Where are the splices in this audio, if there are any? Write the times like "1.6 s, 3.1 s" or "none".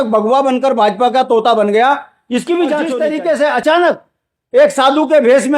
2.9 s